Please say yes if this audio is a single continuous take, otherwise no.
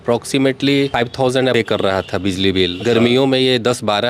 no